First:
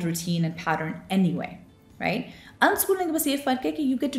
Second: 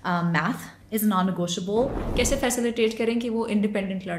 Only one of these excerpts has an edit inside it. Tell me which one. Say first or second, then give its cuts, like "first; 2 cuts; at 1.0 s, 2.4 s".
second; 1 cut; at 2.0 s